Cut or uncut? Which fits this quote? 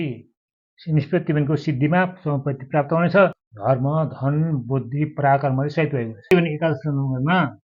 cut